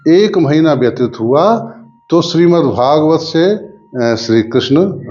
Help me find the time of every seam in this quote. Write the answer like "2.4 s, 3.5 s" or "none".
none